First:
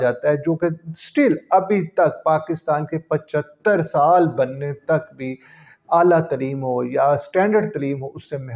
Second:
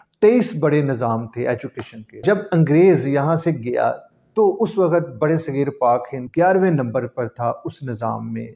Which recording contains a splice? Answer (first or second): second